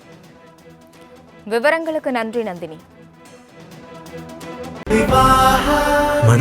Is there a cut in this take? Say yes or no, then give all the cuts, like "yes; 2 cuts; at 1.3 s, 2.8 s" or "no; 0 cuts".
yes; 1 cut; at 4.8 s